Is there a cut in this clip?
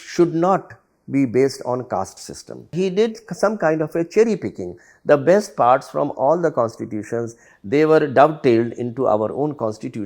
yes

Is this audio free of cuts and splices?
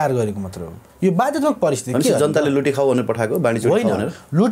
yes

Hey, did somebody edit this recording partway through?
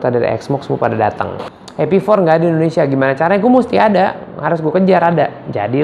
yes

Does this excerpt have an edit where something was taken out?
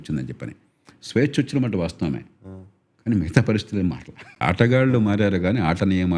yes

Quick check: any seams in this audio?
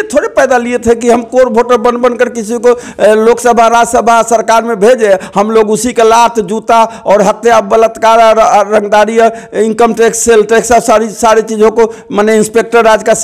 no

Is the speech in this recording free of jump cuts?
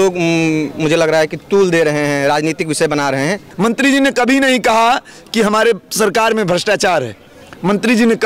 no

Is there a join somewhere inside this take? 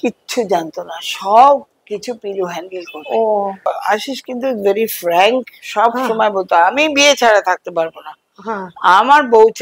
yes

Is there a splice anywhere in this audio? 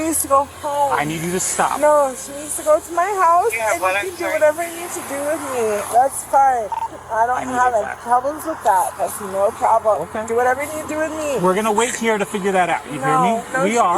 no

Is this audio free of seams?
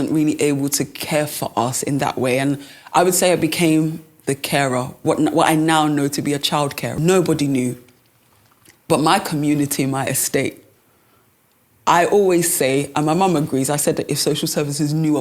no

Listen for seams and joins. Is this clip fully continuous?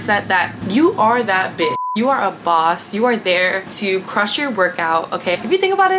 no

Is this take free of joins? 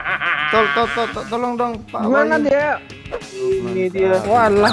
no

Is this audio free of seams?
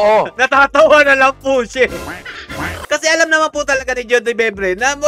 yes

